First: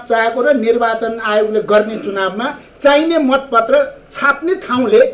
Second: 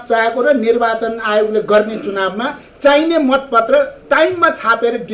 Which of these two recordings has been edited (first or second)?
second